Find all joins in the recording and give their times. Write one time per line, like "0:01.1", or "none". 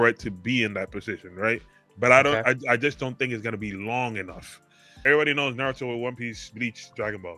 0:05.0